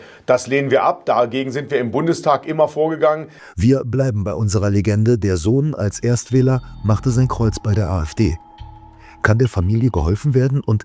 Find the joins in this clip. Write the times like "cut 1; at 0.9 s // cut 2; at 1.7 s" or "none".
cut 1; at 3.3 s